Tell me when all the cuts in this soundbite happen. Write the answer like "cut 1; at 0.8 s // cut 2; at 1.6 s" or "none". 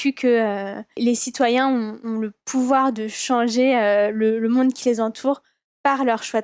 cut 1; at 1.0 s